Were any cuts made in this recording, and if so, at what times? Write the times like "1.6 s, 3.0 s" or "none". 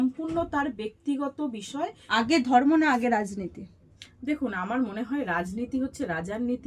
2.0 s